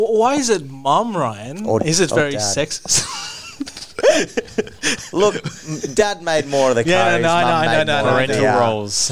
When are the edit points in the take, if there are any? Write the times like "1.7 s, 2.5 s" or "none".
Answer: none